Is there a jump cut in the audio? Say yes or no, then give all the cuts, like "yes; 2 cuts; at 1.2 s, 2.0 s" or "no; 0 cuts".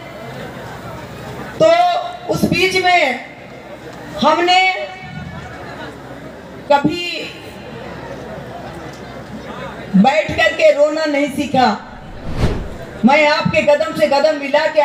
no; 0 cuts